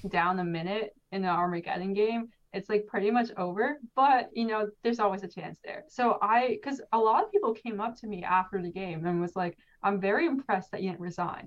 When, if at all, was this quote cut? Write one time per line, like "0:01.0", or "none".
0:05.8